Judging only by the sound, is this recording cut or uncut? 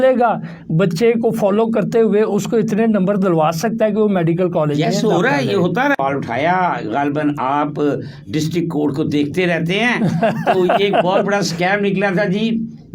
cut